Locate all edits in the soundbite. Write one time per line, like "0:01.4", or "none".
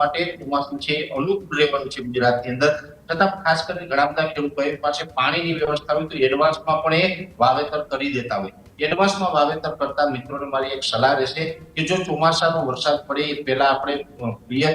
none